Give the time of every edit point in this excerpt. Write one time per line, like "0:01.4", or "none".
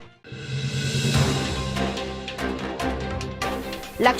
0:01.9